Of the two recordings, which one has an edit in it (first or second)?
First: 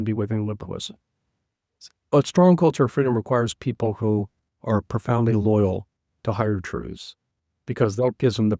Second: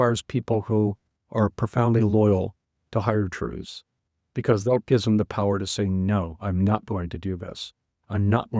first